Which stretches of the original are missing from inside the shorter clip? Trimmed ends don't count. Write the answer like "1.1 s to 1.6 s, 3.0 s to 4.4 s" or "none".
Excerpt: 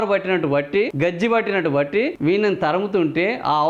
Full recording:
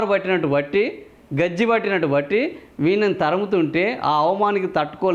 0.9 s to 1.3 s, 2.5 s to 2.7 s

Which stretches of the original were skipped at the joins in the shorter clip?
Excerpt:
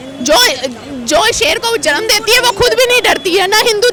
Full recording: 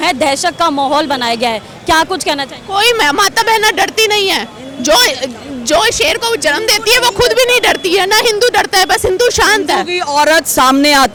none

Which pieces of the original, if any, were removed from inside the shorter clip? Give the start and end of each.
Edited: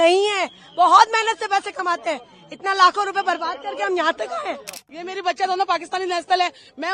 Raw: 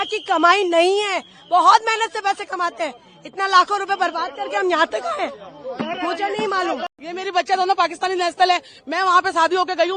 5.6 s to 6.9 s

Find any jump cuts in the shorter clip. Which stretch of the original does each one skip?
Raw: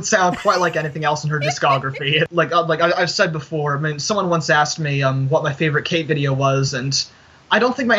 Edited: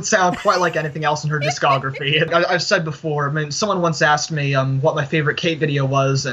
2.3 s to 2.8 s

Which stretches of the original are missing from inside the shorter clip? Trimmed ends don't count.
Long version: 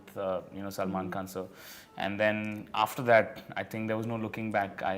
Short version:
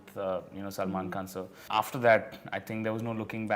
1.6 s to 2.6 s

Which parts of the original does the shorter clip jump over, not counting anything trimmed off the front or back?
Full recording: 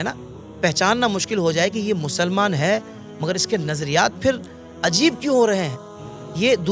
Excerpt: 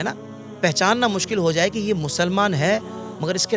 none

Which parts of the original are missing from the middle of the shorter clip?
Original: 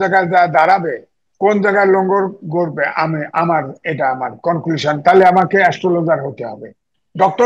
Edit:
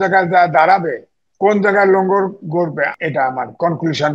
2.9 s to 3.8 s

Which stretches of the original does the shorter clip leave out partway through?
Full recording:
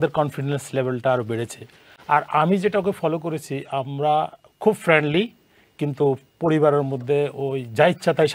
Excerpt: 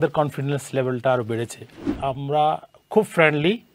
1.8 s to 3.5 s

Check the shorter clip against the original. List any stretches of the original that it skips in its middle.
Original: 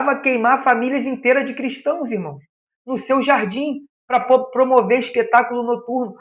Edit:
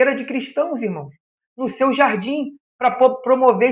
none

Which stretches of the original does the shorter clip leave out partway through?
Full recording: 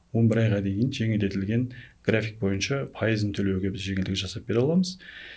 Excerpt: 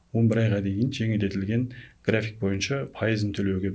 none

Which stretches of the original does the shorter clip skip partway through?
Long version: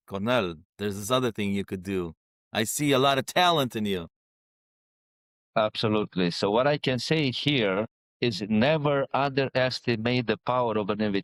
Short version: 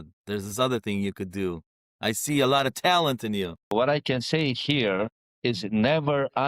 4.2 s to 6.5 s

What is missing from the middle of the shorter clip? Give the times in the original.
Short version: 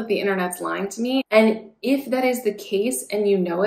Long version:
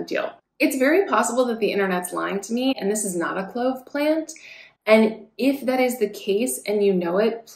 2.8 s to 4.8 s

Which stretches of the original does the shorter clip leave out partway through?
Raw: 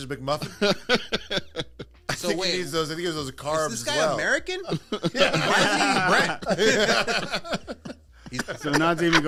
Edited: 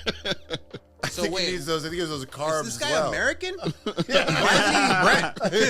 none

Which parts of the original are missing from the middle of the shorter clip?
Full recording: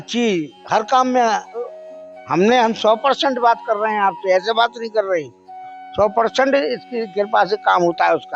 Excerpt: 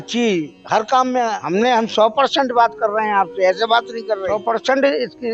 1.4 s to 2.3 s, 5.1 s to 5.9 s

